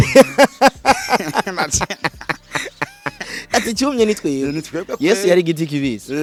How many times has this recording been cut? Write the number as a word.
zero